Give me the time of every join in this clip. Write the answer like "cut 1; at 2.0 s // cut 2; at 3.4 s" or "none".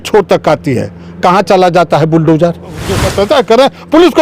cut 1; at 3.1 s